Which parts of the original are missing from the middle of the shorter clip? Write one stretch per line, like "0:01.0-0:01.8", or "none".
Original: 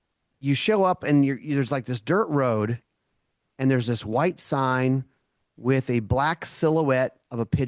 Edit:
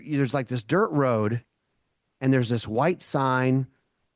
none